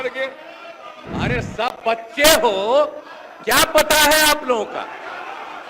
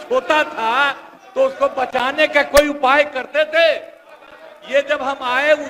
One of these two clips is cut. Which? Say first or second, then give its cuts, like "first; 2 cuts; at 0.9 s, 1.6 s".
first; 1 cut; at 0.9 s